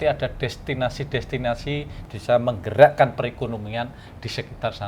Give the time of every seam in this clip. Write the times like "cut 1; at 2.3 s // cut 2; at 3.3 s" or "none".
cut 1; at 2.0 s